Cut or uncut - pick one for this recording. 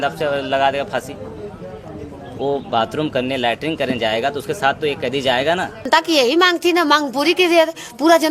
cut